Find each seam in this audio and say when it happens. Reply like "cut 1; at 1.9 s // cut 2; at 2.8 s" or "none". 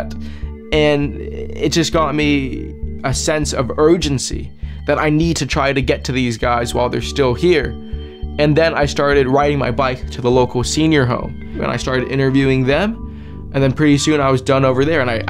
cut 1; at 7.8 s